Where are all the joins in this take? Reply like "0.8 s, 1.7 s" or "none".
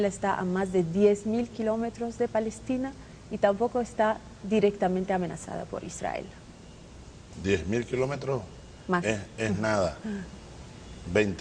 7.3 s